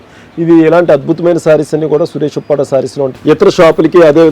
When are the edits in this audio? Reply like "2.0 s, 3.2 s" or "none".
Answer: 3.1 s